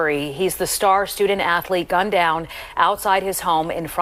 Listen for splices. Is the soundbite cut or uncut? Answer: uncut